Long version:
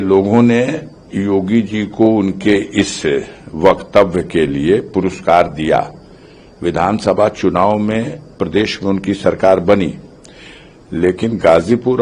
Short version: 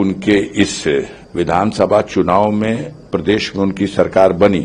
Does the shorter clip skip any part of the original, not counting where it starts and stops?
yes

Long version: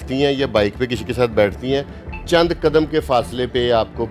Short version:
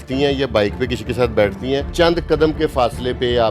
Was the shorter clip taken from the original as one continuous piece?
no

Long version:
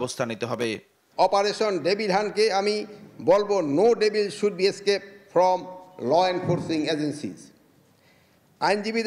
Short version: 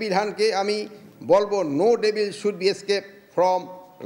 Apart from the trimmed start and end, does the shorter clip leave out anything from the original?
no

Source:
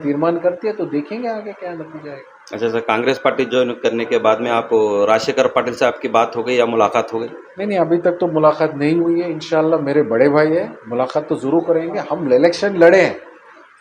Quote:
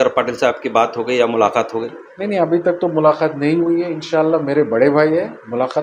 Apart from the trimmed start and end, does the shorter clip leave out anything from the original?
no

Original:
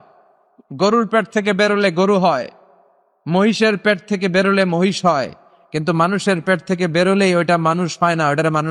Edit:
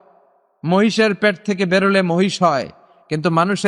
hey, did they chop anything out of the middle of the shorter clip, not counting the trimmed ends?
no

